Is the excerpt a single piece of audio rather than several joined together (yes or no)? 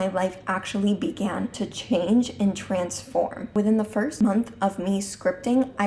no